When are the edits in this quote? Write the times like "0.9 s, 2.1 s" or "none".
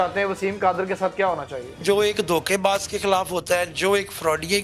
1.8 s

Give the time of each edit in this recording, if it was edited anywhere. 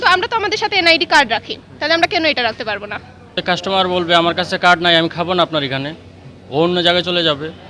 3.4 s

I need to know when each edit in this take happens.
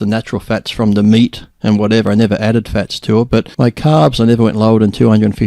3.5 s

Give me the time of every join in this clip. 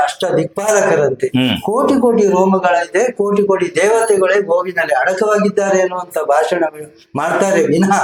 none

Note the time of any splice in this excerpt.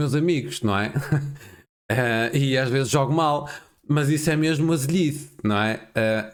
none

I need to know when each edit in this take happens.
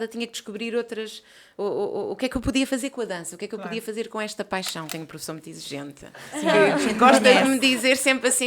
4.9 s

